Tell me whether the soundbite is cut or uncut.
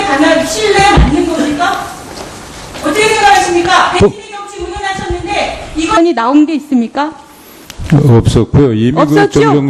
uncut